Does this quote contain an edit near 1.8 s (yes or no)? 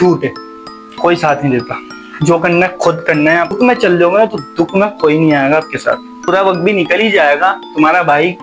no